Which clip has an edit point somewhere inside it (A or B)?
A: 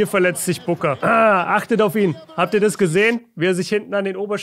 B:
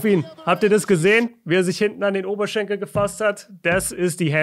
A